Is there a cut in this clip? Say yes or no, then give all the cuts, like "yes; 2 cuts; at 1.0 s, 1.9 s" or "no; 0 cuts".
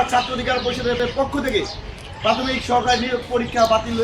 no; 0 cuts